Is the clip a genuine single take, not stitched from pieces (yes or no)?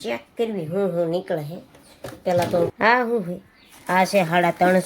no